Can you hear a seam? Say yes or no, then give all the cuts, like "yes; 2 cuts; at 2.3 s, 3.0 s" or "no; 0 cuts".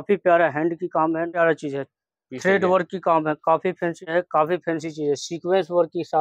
yes; 2 cuts; at 1.3 s, 4.1 s